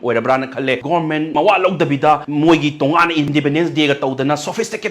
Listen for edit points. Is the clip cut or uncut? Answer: cut